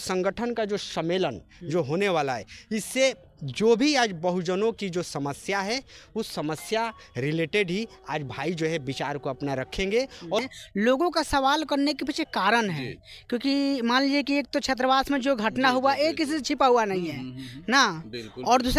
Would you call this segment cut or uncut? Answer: cut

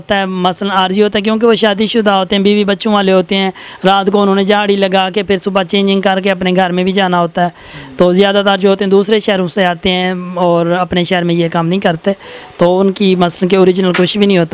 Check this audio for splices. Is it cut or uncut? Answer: uncut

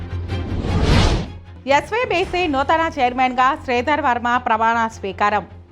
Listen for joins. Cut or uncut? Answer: cut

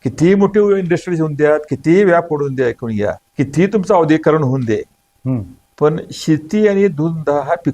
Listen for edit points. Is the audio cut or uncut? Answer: cut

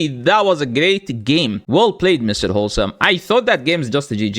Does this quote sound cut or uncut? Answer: cut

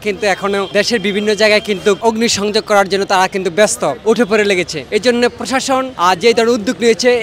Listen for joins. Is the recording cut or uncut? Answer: uncut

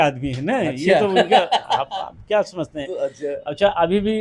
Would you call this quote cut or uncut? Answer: uncut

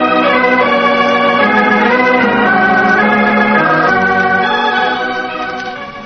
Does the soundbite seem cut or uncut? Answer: uncut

